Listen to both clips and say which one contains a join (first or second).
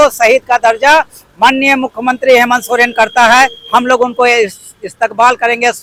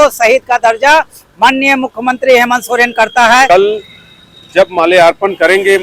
second